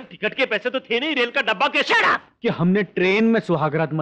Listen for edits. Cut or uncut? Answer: cut